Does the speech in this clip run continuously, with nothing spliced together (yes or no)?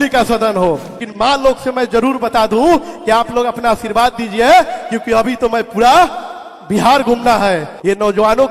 yes